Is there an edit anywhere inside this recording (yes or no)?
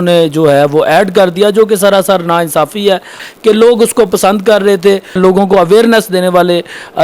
yes